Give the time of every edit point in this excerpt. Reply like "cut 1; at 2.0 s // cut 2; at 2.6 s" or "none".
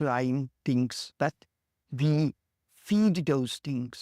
cut 1; at 1.0 s